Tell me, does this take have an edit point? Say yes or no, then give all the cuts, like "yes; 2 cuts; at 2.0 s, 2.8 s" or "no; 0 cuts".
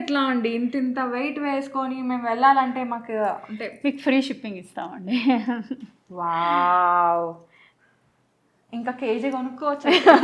no; 0 cuts